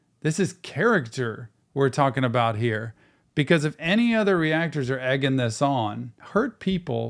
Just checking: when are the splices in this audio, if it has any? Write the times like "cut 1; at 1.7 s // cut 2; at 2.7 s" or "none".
cut 1; at 6.1 s